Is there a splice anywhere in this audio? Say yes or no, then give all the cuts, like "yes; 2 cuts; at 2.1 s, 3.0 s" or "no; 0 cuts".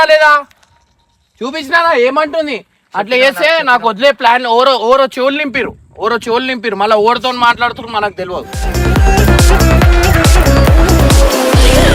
no; 0 cuts